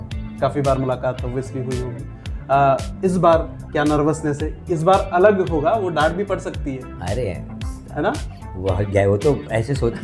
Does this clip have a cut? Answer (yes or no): no